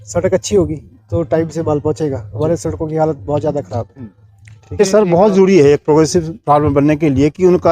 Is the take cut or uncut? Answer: cut